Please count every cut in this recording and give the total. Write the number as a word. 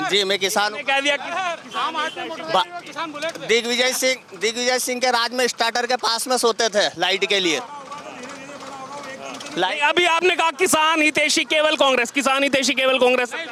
zero